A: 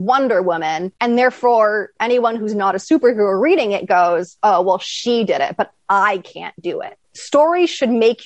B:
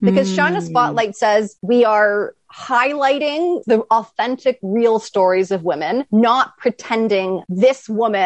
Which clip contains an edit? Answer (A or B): B